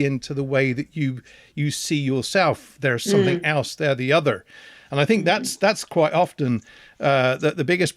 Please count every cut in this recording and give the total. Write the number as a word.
zero